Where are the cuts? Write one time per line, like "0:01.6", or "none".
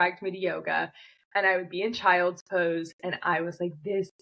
none